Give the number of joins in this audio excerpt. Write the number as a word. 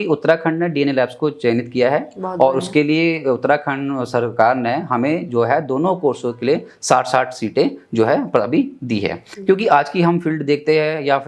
one